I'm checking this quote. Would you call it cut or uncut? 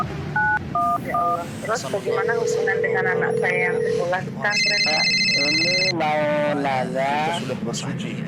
uncut